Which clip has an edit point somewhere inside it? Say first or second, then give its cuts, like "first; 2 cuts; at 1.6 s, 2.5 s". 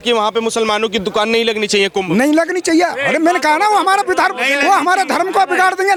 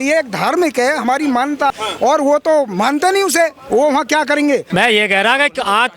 second; 2 cuts; at 1.7 s, 4.7 s